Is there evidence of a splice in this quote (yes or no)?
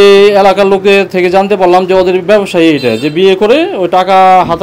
no